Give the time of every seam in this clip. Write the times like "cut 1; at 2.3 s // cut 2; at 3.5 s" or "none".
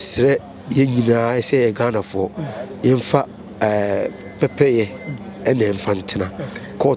none